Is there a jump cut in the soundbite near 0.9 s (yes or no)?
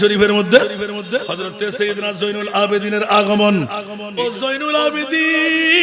no